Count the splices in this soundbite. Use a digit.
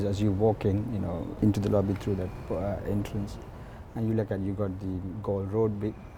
1